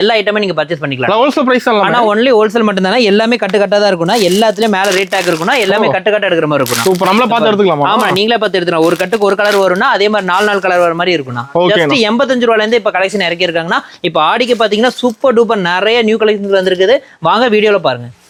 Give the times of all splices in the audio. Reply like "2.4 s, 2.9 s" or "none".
none